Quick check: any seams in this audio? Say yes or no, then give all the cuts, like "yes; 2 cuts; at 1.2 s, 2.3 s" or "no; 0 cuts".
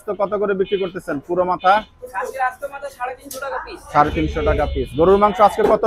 no; 0 cuts